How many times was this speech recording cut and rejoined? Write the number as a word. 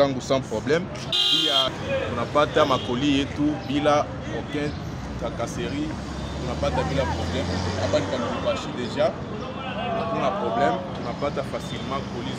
one